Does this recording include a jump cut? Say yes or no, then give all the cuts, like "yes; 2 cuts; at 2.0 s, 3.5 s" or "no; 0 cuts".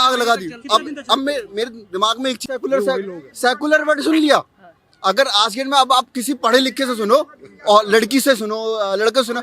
yes; 1 cut; at 2.4 s